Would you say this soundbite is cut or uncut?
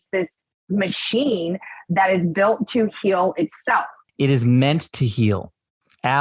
cut